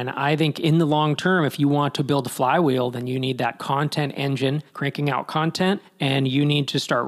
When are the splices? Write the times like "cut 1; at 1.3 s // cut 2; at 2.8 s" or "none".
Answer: cut 1; at 4.7 s // cut 2; at 5.9 s